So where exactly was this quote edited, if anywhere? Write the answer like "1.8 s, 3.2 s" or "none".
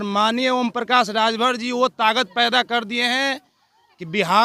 none